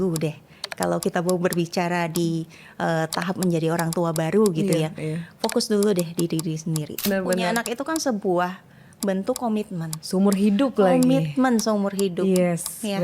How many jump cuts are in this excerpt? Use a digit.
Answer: 1